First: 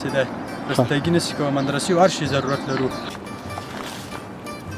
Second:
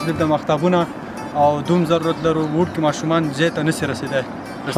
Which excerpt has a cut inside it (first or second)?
first